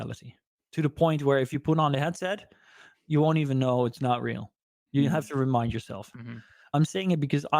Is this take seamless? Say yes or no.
no